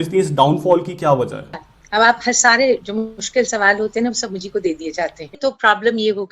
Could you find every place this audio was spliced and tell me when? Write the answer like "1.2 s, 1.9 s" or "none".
1.7 s, 3.2 s, 5.3 s